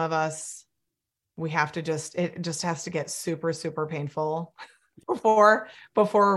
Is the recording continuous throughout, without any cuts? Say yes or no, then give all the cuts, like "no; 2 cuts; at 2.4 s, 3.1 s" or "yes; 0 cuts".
no; 1 cut; at 4.8 s